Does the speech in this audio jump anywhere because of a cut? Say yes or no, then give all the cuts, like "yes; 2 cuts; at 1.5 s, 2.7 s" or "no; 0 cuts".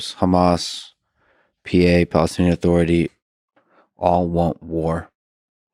no; 0 cuts